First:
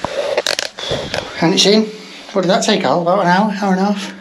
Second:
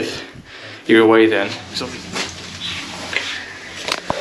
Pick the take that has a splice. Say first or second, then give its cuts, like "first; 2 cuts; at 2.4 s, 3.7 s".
second; 1 cut; at 1.6 s